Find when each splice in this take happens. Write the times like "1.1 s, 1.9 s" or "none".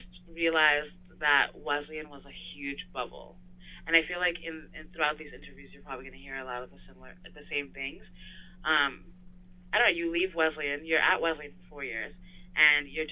none